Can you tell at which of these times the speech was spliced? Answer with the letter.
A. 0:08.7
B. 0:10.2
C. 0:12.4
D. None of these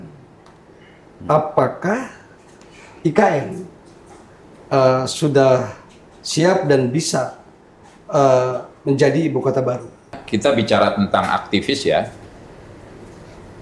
B